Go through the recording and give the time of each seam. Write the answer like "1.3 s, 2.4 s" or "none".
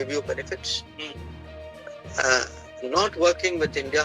none